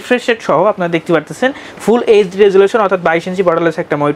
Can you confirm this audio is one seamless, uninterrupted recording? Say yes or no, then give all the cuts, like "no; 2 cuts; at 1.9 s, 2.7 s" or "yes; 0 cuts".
yes; 0 cuts